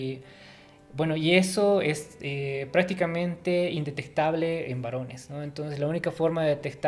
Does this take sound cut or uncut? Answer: uncut